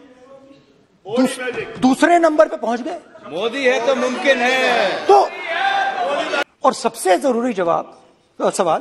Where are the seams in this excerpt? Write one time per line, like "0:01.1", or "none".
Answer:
0:06.4